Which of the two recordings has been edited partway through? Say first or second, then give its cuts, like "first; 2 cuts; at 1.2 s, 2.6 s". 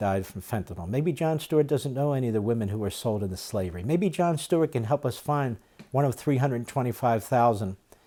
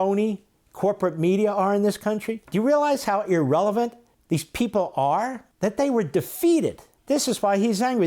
second; 4 cuts; at 2.4 s, 4.1 s, 5.4 s, 6.9 s